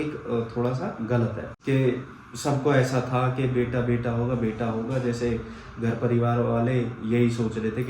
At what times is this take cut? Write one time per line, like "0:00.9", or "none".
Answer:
0:01.5